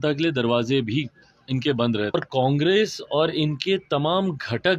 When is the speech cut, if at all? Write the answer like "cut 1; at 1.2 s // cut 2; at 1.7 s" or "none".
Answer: cut 1; at 2.1 s